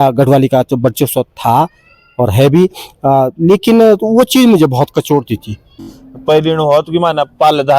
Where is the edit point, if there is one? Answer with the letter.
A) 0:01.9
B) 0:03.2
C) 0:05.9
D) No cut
C